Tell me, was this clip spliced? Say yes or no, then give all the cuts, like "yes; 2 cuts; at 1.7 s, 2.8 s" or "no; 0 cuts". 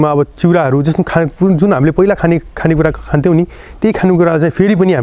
no; 0 cuts